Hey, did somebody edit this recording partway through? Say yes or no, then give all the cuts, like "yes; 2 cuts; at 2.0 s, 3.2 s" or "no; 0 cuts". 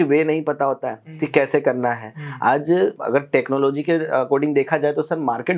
yes; 1 cut; at 3.0 s